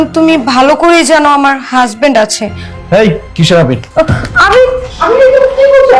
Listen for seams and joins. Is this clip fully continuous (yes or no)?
no